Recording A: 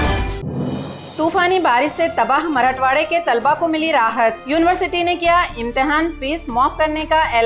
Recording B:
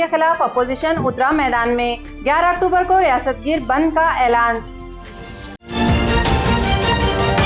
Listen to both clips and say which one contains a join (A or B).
A